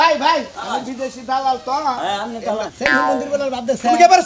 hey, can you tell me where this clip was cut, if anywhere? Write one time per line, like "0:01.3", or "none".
0:02.7